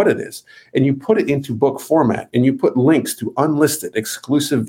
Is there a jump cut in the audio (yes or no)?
no